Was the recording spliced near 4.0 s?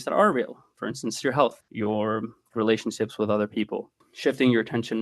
yes; 2 cuts; at 1.7 s, 4.0 s

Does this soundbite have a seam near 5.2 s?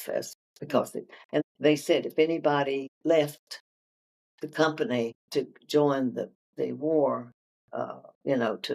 yes; 3 cuts; at 1.4 s, 2.9 s, 5.2 s

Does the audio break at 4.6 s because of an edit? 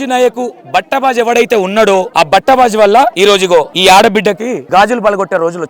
yes; 3 cuts; at 2.1 s, 3.3 s, 4.6 s

